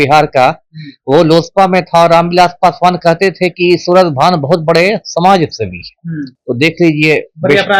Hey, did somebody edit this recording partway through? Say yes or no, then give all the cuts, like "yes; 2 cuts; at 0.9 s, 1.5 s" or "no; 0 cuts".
no; 0 cuts